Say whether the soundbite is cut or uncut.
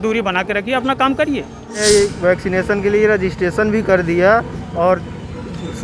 cut